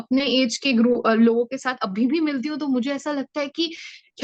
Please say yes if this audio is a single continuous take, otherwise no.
yes